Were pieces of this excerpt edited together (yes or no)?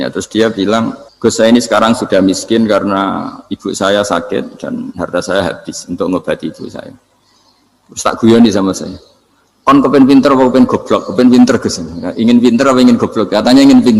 yes